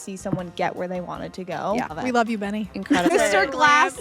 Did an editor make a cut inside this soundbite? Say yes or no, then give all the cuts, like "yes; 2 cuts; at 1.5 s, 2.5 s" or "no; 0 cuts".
yes; 2 cuts; at 1.9 s, 3.1 s